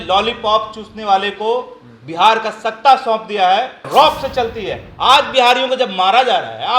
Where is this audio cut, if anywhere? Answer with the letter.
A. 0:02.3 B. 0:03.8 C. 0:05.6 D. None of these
B